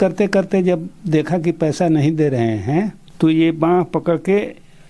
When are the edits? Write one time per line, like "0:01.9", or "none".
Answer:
0:03.0